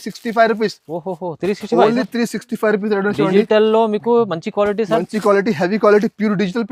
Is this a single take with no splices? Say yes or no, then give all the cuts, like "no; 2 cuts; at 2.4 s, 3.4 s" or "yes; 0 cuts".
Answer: yes; 0 cuts